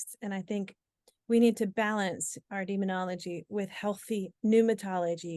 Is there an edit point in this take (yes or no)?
no